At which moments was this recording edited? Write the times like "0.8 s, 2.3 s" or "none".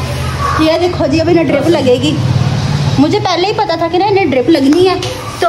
2.5 s